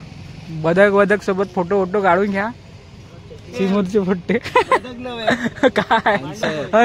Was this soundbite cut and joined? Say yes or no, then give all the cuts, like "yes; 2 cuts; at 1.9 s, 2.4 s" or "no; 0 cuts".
no; 0 cuts